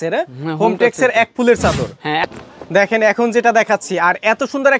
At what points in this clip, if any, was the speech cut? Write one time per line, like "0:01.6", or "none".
0:02.3